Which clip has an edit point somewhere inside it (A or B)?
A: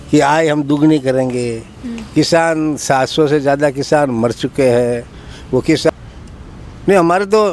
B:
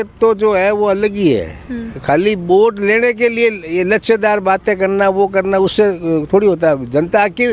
A